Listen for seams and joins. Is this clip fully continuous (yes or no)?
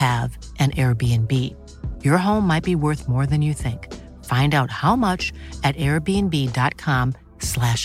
yes